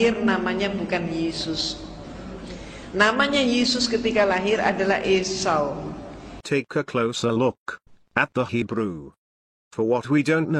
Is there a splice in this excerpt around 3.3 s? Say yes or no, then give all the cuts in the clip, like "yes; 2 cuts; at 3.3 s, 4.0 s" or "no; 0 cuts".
no; 2 cuts; at 2.0 s, 6.2 s